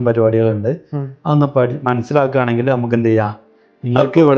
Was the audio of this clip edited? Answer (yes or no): no